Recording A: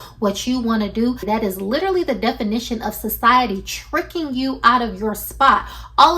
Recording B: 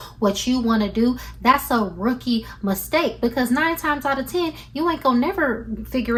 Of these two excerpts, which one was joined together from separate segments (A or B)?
A